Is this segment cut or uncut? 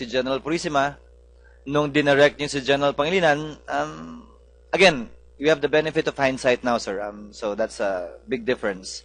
cut